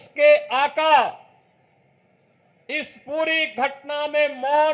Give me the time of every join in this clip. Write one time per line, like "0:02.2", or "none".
none